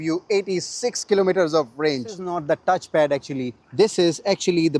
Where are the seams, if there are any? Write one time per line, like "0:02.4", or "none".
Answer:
0:02.3